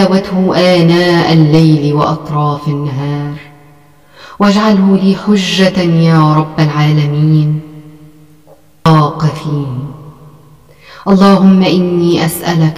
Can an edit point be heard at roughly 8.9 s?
yes; 1 cut; at 8.9 s

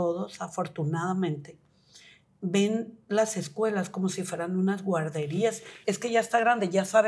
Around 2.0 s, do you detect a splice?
no; 1 cut; at 5.7 s

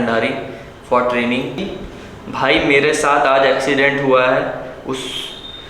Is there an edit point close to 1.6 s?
yes; 1 cut; at 1.6 s

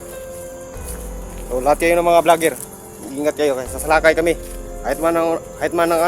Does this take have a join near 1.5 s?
yes; 1 cut; at 1.5 s

